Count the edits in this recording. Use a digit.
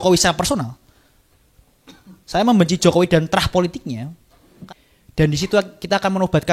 1